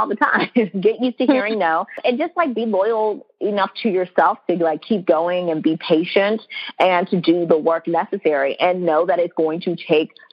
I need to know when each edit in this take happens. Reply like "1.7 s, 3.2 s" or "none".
1.9 s